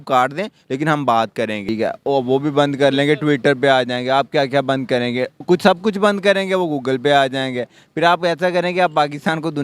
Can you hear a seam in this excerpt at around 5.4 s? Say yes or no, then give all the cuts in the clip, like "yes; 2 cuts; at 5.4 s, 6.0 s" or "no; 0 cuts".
yes; 2 cuts; at 1.7 s, 5.4 s